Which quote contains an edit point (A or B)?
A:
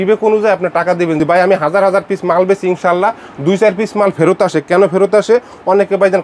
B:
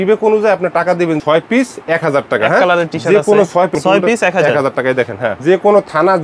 B